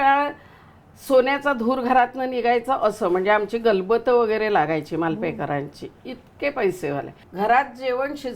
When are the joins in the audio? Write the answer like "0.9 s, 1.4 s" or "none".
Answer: 7.2 s